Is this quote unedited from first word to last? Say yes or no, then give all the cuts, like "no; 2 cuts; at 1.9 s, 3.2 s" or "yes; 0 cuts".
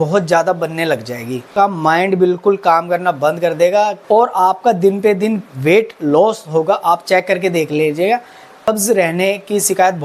no; 3 cuts; at 1.4 s, 4.0 s, 8.7 s